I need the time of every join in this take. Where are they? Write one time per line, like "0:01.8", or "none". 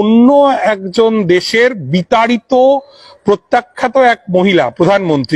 none